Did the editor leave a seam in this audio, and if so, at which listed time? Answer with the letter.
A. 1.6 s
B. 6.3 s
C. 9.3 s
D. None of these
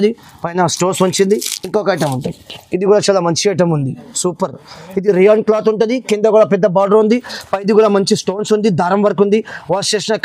A